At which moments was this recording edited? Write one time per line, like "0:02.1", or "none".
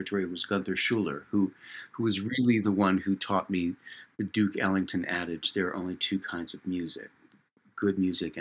none